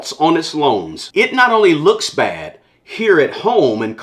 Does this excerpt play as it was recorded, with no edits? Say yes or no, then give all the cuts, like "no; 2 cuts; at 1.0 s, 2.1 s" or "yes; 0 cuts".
no; 1 cut; at 1.0 s